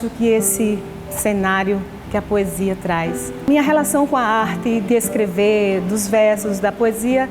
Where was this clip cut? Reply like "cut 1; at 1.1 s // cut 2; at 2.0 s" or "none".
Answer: cut 1; at 3.5 s